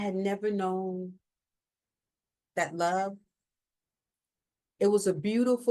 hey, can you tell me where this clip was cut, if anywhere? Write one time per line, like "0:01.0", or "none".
none